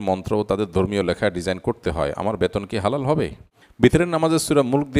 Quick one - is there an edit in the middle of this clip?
yes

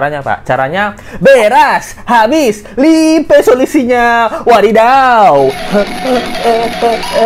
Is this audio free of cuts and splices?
yes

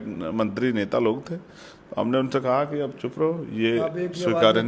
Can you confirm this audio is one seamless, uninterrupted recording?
yes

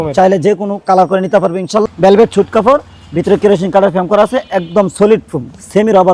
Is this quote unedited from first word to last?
no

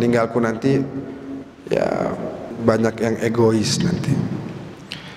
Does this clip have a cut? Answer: yes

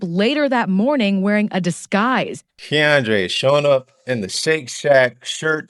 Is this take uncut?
no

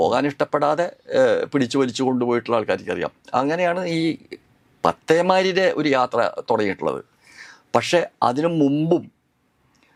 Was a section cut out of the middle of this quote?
no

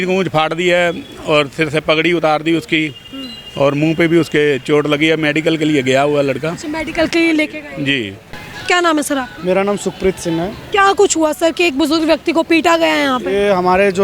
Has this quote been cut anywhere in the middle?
no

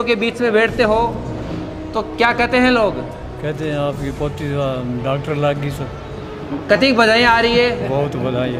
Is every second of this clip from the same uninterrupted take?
yes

